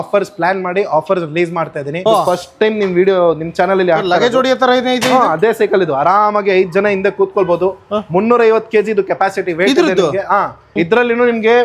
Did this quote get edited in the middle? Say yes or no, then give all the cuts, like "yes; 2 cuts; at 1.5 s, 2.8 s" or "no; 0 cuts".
yes; 2 cuts; at 2.0 s, 10.6 s